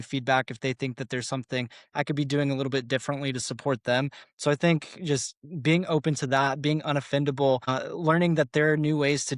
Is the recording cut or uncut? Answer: uncut